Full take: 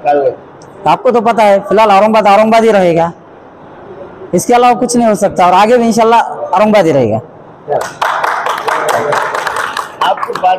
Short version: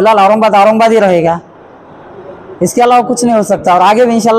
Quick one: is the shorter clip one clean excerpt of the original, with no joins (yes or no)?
yes